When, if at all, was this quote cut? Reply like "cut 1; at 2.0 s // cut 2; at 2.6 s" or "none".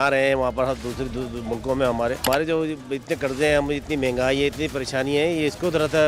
cut 1; at 2.2 s